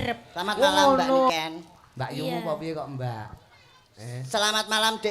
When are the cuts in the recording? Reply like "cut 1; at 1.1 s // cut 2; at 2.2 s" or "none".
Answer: cut 1; at 1.3 s